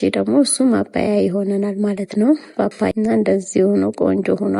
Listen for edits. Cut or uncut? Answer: cut